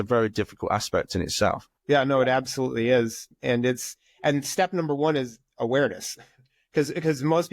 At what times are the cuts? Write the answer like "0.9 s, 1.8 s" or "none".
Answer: 1.7 s, 3.3 s